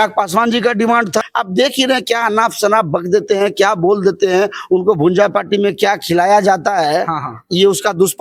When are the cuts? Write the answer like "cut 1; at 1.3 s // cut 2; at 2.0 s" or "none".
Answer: cut 1; at 1.3 s